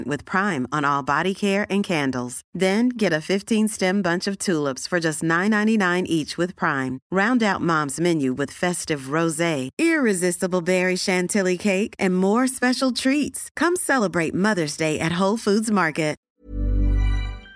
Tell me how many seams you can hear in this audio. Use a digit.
1